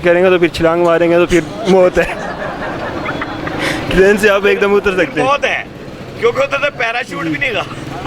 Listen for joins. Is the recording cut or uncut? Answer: uncut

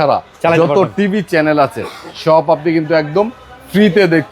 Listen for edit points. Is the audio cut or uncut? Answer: uncut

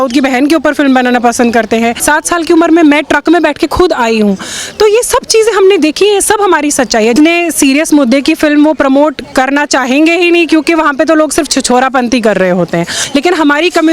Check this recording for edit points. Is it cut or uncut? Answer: cut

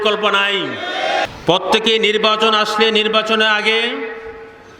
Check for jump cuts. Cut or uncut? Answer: cut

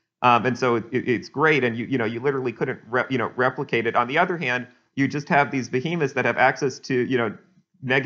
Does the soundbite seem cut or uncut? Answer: uncut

